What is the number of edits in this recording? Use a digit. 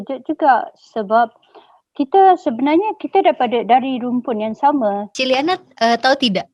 1